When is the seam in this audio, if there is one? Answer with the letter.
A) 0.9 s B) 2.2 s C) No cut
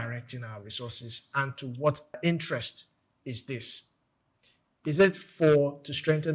B